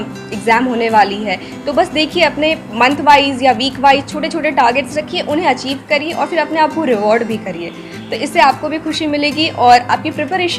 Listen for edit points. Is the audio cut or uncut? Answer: uncut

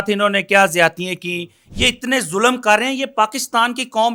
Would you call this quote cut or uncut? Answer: uncut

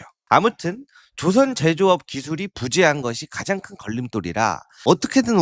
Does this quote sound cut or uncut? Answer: uncut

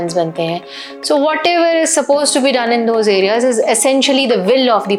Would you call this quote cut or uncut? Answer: uncut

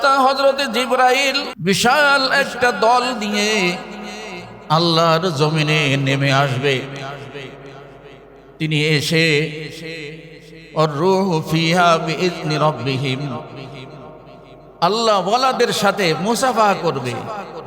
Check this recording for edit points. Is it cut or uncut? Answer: cut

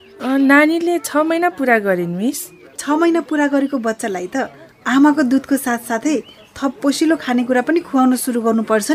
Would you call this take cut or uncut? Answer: cut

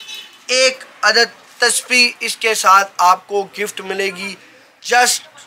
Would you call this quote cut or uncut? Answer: uncut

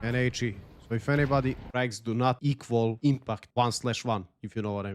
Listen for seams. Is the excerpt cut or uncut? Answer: cut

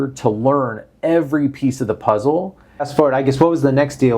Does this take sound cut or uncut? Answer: cut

